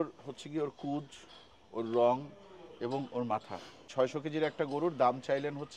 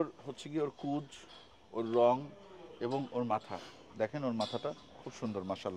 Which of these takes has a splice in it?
first; 1 cut; at 3.9 s

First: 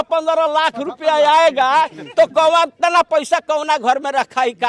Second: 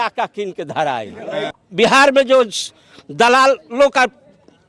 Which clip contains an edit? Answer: second; 1 cut; at 1.4 s

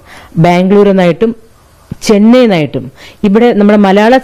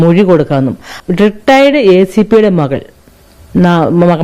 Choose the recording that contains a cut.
second; 1 cut; at 1.0 s

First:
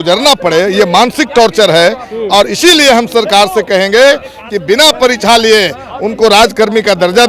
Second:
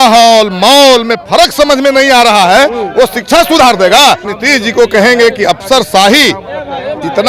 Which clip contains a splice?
second; 1 cut; at 4.3 s

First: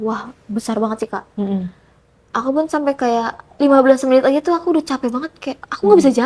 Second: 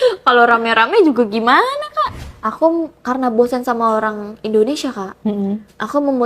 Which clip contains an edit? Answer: second; 1 cut; at 2.2 s

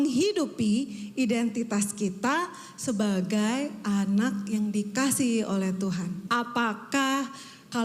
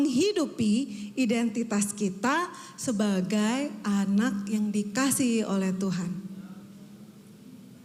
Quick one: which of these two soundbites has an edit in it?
first; 1 cut; at 6.2 s

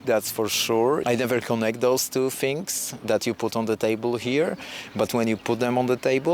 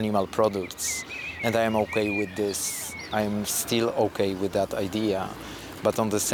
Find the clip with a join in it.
first; 1 cut; at 1.0 s

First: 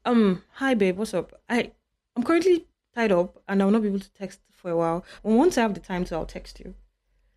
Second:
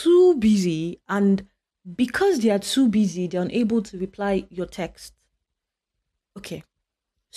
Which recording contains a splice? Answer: first; 1 cut; at 5.1 s

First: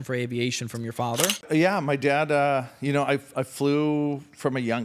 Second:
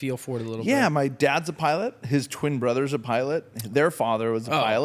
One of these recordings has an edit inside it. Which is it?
first; 1 cut; at 1.4 s

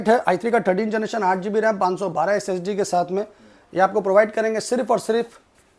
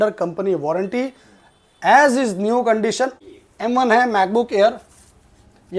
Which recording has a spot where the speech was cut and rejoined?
second; 1 cut; at 3.2 s

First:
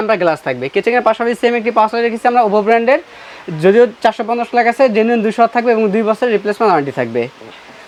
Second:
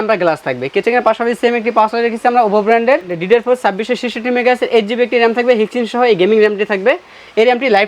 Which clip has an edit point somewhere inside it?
second; 1 cut; at 3.2 s

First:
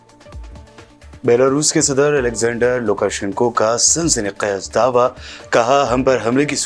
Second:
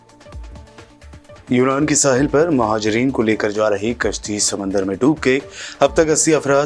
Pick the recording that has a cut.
first; 1 cut; at 0.9 s

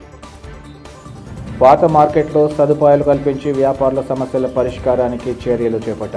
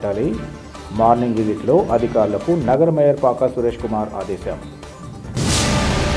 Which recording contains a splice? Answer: first; 1 cut; at 0.9 s

